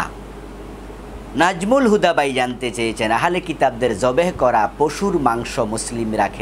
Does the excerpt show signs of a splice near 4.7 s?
no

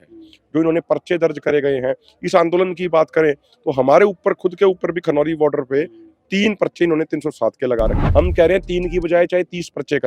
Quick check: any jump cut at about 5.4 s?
no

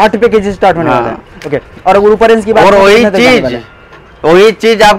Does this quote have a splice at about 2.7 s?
no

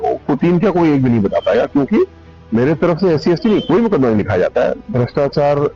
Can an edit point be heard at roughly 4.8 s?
yes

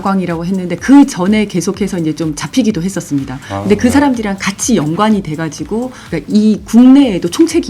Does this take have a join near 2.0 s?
no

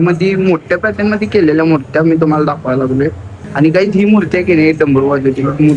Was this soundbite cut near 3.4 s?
yes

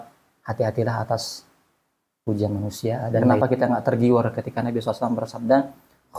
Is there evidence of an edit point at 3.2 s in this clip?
yes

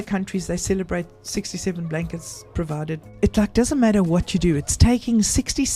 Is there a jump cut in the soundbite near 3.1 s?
yes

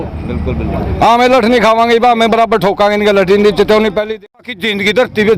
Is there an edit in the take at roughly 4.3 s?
yes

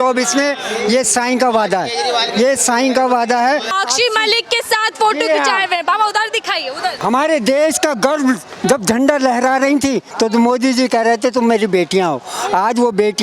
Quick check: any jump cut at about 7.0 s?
yes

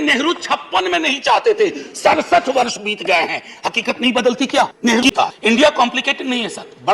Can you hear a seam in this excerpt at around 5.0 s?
yes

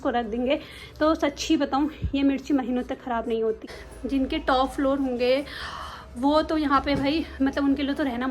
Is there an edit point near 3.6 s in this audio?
yes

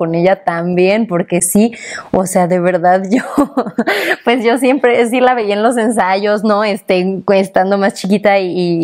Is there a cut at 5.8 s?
no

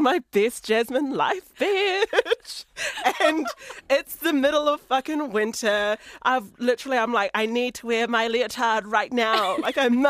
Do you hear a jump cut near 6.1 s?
yes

